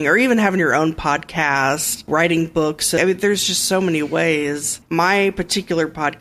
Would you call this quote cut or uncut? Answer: cut